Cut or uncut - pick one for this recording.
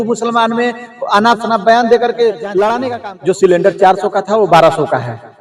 cut